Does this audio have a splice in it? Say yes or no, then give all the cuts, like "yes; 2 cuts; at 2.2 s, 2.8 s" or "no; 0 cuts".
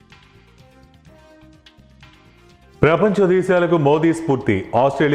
yes; 1 cut; at 2.8 s